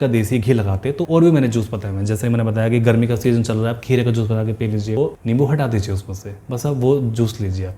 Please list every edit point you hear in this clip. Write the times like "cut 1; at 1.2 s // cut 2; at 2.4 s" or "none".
cut 1; at 1.0 s // cut 2; at 5.0 s